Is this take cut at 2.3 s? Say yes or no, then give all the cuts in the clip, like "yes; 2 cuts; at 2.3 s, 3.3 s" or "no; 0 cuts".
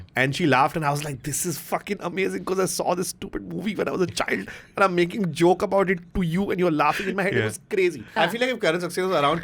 no; 1 cut; at 8.1 s